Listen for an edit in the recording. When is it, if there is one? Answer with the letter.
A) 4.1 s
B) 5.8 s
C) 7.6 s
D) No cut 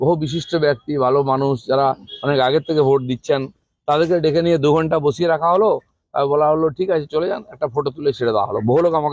D